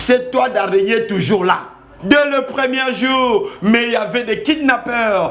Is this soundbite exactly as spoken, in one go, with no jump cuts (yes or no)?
no